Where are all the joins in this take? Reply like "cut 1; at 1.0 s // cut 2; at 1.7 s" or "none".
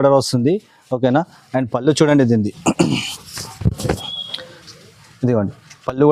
none